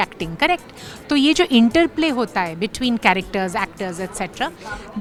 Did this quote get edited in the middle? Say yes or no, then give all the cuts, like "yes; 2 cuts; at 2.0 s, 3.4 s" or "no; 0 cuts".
no; 0 cuts